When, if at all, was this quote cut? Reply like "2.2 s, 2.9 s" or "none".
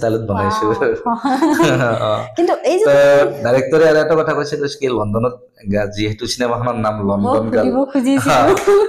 none